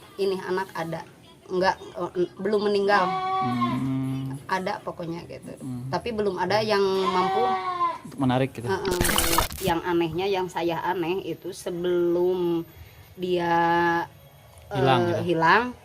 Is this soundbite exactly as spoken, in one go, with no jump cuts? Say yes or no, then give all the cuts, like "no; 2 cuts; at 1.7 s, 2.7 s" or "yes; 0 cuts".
no; 1 cut; at 9.2 s